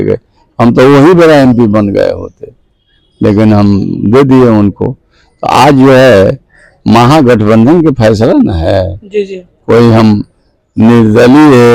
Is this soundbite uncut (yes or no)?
yes